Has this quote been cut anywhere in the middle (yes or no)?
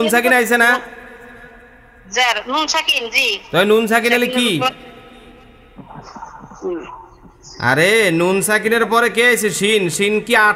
no